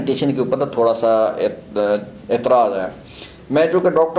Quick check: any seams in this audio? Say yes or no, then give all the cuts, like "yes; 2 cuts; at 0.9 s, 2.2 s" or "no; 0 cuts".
no; 0 cuts